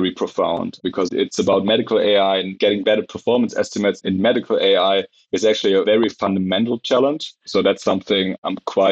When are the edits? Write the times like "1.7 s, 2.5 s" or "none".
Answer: 1.0 s, 2.5 s, 5.8 s, 7.4 s